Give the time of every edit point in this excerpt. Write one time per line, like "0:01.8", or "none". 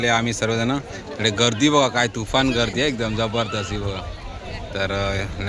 none